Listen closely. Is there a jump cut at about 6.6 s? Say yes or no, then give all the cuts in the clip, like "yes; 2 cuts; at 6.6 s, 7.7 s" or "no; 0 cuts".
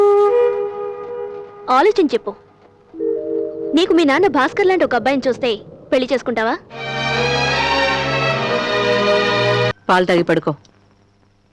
no; 0 cuts